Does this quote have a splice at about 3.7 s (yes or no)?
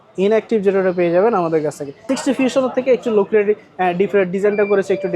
no